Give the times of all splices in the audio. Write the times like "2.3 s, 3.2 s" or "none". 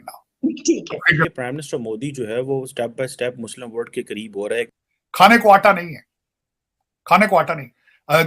1.2 s, 4.7 s